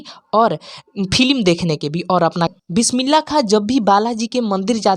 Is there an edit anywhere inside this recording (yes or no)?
yes